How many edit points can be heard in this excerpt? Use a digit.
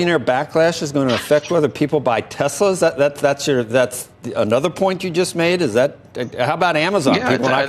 0